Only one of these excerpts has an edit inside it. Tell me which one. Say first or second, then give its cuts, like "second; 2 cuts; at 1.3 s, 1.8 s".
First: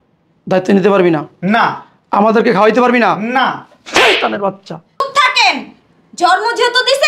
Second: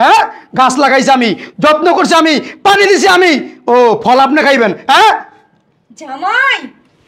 first; 1 cut; at 5.0 s